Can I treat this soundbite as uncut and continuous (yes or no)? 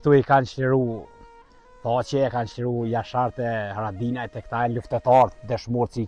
yes